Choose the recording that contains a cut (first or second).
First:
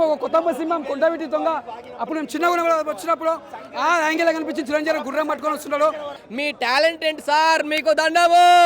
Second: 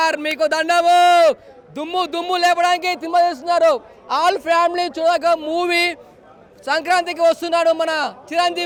first